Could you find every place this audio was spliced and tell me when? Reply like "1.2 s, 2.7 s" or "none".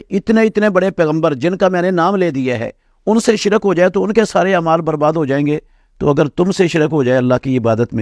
none